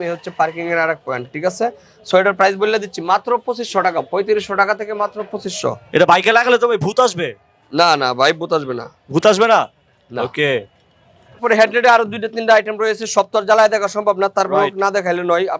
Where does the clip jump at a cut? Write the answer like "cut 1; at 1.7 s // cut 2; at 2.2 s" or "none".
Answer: none